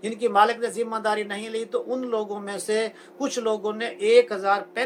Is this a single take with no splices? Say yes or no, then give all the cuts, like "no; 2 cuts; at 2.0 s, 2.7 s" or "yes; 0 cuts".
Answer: yes; 0 cuts